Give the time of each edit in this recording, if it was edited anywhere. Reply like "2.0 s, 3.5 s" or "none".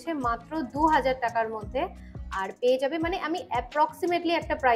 none